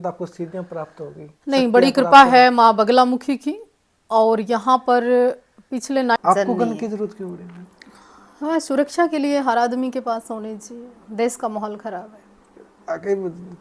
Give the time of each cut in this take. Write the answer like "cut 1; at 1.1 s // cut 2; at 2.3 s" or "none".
cut 1; at 6.2 s